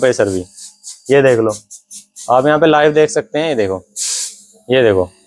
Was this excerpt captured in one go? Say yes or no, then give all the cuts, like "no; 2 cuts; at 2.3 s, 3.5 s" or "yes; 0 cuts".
yes; 0 cuts